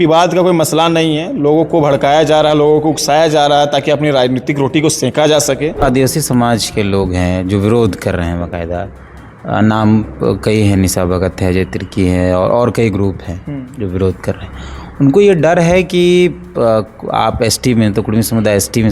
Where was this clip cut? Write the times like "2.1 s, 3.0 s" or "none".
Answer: 5.8 s